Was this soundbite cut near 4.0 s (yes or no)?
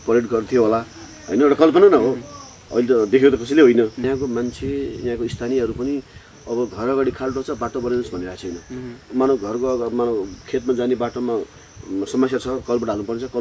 yes